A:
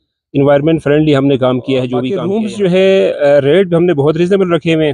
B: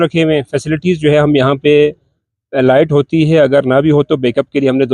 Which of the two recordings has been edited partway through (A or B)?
A